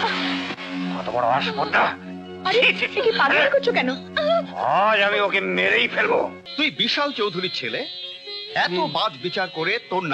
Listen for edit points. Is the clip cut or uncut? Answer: cut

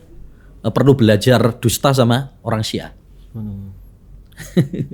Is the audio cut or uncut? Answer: uncut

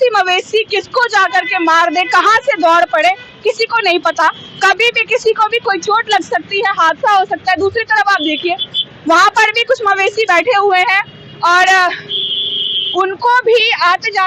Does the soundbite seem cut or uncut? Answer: uncut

